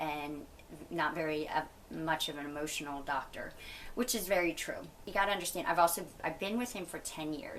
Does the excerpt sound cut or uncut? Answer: cut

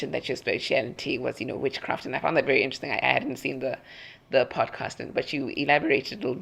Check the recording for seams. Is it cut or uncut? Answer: uncut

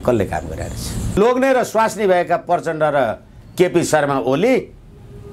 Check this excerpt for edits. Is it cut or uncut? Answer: cut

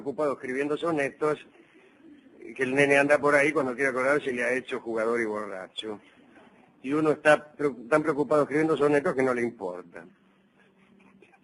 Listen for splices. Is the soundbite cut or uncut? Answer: uncut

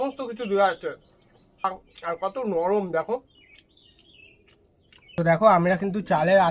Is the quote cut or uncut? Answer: cut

